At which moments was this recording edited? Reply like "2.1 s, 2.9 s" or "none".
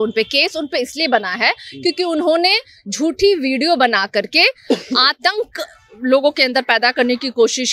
none